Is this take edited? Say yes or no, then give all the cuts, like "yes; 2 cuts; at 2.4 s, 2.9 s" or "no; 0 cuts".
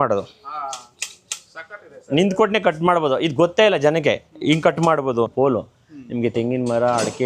yes; 1 cut; at 5.3 s